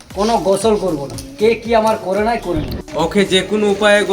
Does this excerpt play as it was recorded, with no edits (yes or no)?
no